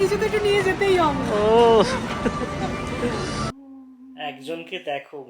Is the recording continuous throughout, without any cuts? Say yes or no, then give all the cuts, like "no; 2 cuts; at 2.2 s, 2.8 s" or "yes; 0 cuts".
no; 1 cut; at 3.4 s